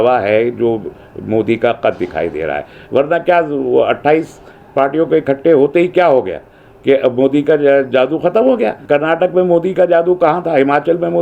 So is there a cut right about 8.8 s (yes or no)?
yes